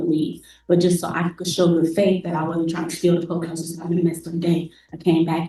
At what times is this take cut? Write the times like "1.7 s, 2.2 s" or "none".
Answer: none